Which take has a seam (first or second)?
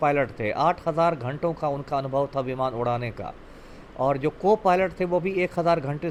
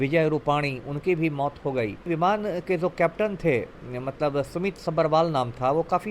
second